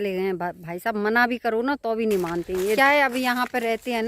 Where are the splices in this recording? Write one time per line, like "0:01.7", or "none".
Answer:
0:02.8